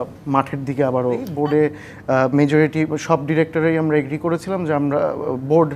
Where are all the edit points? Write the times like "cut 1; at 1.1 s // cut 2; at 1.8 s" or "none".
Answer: cut 1; at 1.3 s